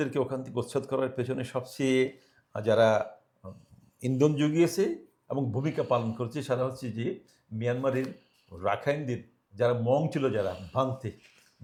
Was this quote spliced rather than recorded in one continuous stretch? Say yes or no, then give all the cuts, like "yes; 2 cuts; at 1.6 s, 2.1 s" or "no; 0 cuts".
no; 0 cuts